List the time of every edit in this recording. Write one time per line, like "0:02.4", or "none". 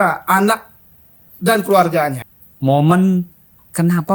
0:02.3